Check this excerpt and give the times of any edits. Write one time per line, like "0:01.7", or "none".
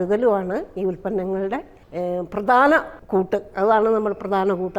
0:01.8
0:03.0